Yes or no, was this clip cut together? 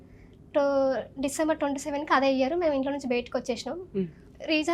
no